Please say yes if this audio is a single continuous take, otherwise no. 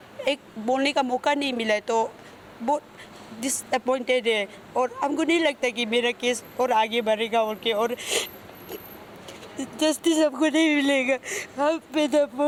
yes